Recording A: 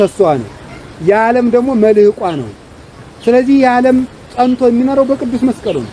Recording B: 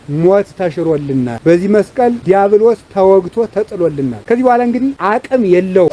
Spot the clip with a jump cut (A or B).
B